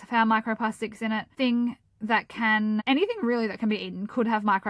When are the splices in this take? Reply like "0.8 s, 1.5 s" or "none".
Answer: 1.3 s, 2.8 s